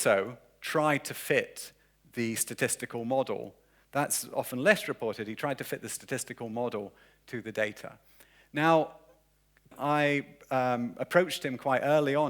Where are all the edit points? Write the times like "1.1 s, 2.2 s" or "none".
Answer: 9.7 s